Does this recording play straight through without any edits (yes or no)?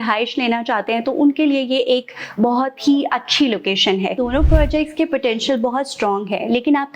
no